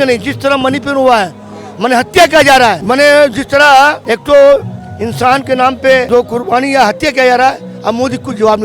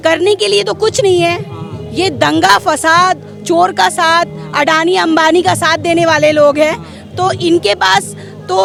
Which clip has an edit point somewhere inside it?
first; 3 cuts; at 2.8 s, 4.1 s, 6.1 s

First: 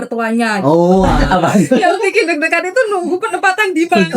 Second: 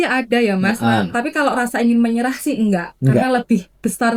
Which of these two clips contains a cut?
first; 1 cut; at 1.2 s

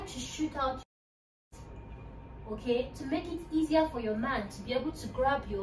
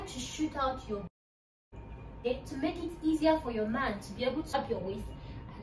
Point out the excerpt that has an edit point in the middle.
second; 2 cuts; at 2.3 s, 4.5 s

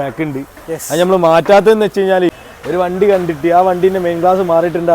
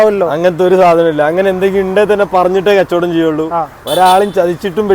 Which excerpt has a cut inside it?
first; 1 cut; at 2.4 s

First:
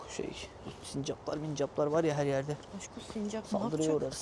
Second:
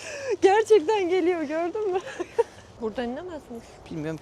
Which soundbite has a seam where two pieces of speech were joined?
second; 1 cut; at 2.6 s

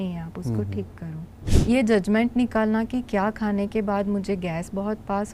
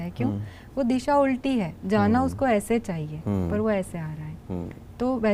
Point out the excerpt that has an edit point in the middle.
first; 1 cut; at 1.4 s

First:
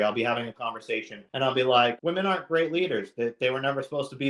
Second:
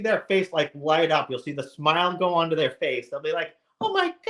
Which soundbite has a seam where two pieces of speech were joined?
first; 2 cuts; at 1.2 s, 2.0 s

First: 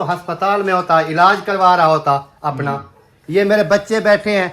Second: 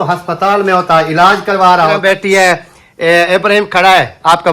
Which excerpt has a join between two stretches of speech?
second; 1 cut; at 2.0 s

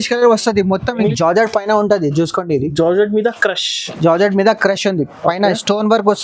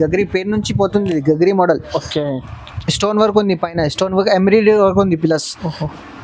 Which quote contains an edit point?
first; 1 cut; at 1.0 s

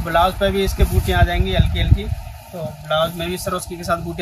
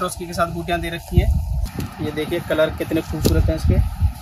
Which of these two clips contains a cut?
second; 1 cut; at 1.7 s

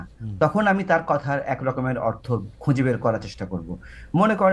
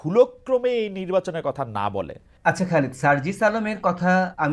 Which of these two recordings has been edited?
second; 1 cut; at 2.2 s

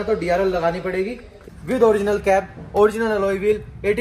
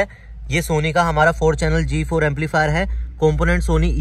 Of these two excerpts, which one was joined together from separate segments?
first; 1 cut; at 1.4 s

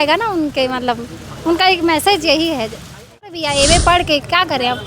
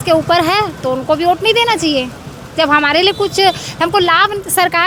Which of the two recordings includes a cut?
first; 1 cut; at 3.4 s

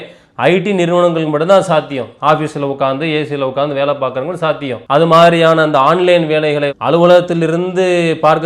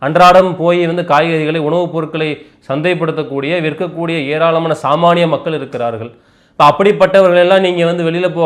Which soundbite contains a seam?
first; 1 cut; at 4.8 s

